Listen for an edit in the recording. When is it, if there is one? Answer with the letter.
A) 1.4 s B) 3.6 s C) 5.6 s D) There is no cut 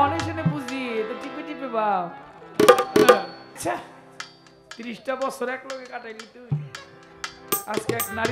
B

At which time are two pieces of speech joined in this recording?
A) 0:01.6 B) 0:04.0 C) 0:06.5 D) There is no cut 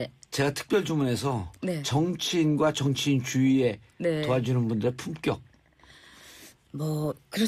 C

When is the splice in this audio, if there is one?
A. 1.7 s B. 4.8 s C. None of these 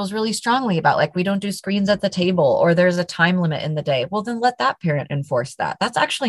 C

